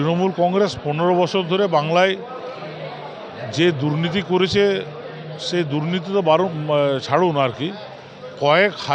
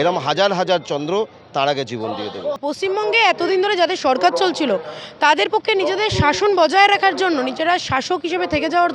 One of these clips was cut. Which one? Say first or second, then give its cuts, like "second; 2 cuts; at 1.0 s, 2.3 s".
second; 1 cut; at 2.7 s